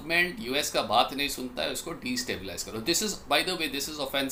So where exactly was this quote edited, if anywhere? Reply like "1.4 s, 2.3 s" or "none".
none